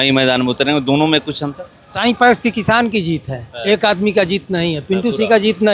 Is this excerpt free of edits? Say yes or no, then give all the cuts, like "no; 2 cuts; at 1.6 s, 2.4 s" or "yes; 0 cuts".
no; 1 cut; at 1.9 s